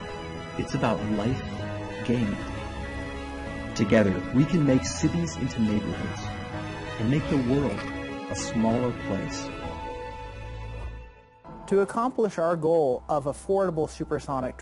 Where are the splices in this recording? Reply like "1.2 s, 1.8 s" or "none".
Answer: 8.6 s